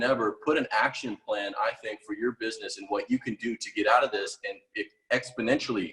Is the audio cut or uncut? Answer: uncut